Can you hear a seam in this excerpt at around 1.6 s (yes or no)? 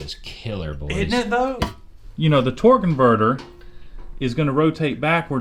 yes